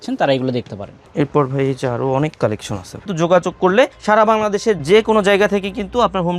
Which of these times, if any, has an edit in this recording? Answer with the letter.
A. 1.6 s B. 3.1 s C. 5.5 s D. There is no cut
B